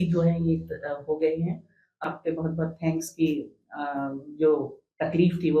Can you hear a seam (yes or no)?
yes